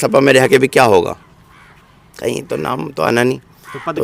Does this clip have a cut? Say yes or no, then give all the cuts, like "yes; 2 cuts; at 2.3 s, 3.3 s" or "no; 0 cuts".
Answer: no; 0 cuts